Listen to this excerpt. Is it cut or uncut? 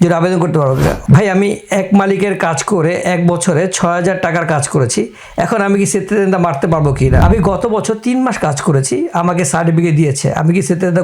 cut